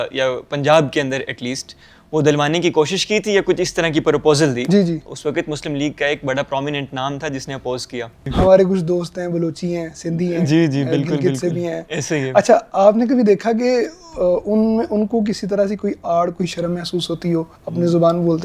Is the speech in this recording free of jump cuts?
no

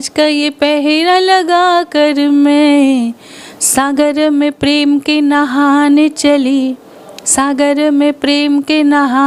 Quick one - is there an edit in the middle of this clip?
no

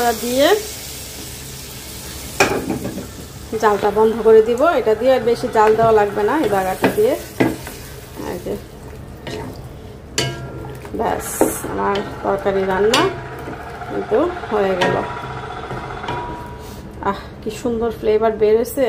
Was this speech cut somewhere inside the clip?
no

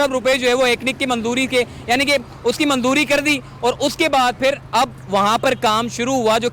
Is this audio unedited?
yes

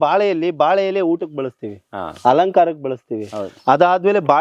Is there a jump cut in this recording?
no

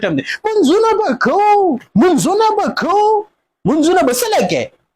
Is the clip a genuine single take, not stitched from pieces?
yes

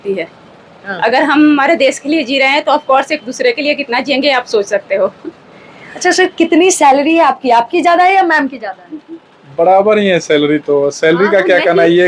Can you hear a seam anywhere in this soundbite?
no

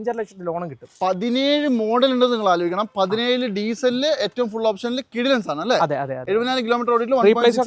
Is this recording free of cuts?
yes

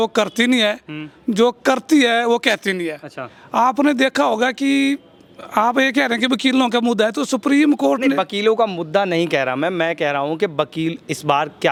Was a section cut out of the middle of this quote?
no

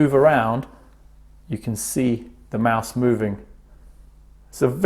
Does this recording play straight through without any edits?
yes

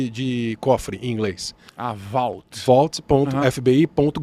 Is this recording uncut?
yes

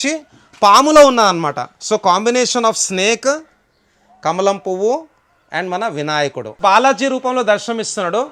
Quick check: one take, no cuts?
no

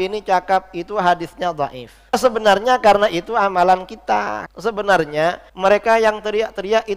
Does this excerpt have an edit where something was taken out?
yes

